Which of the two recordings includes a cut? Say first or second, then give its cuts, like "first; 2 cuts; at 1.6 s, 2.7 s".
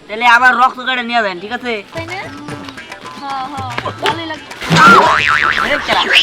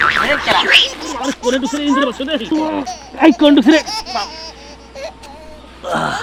first; 1 cut; at 1.9 s